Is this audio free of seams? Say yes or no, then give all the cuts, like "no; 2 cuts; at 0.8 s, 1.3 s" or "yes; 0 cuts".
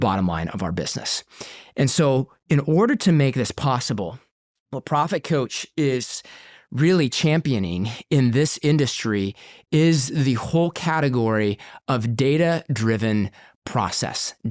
yes; 0 cuts